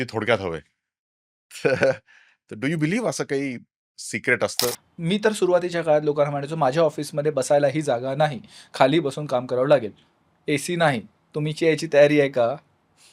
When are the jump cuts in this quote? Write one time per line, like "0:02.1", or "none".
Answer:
0:04.9

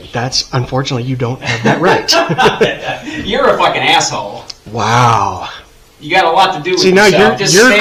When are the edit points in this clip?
none

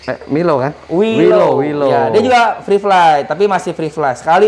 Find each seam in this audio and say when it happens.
none

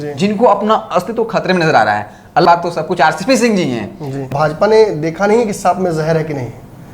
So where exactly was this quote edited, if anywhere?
0:02.4
0:04.3

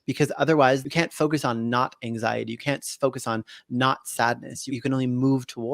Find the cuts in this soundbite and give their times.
0:00.8
0:04.7

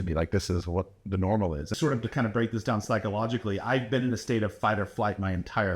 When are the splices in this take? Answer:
0:01.7

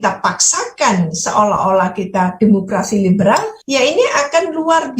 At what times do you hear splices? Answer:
0:03.6

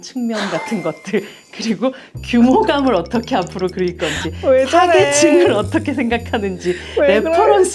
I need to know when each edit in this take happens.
none

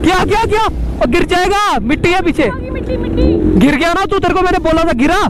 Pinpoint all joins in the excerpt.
0:03.4

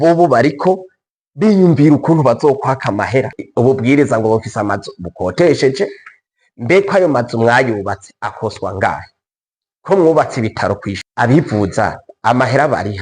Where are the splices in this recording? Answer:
0:03.4
0:11.0

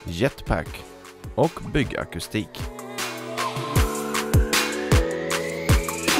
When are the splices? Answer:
0:02.6

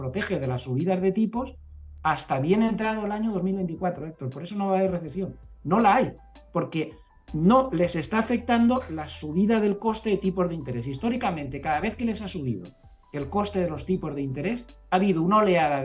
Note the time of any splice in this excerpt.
none

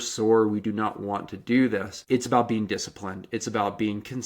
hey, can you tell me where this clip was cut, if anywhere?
0:01.9

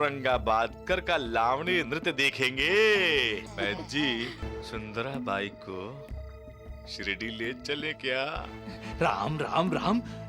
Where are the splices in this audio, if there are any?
0:03.5
0:04.5

